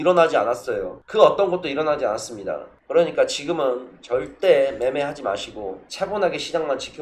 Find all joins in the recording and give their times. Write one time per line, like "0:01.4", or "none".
none